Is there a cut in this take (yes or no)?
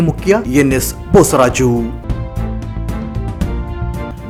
no